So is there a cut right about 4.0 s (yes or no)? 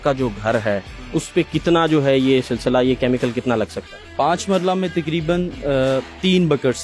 no